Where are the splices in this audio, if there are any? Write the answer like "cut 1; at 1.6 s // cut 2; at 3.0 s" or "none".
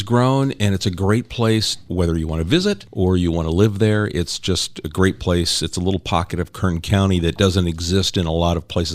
cut 1; at 1.9 s // cut 2; at 2.9 s